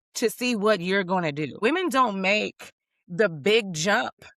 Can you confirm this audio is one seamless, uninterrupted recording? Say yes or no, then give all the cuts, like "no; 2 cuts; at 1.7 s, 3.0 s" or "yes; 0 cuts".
no; 1 cut; at 1.6 s